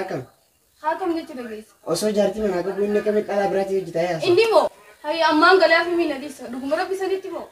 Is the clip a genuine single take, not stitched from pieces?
yes; 0 cuts

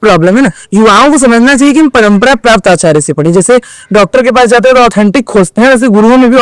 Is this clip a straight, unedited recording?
yes; 0 cuts

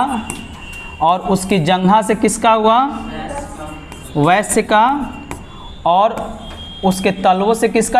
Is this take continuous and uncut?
yes; 0 cuts

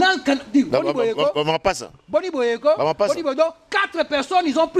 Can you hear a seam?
no; 0 cuts

